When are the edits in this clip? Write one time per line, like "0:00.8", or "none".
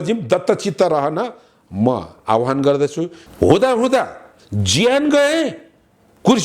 0:03.2